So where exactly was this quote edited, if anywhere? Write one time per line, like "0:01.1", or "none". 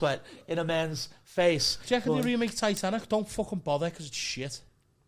0:01.8